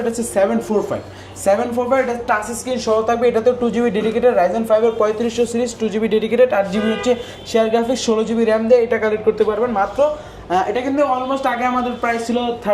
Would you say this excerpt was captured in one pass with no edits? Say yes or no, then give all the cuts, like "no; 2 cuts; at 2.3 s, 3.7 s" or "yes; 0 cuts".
yes; 0 cuts